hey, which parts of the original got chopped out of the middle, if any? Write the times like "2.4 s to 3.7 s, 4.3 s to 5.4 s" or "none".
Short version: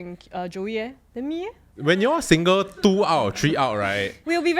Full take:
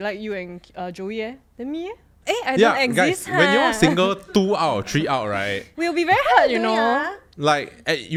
2.2 s to 3.2 s